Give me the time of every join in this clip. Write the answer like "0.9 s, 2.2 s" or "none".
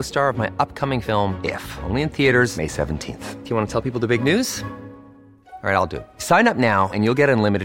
none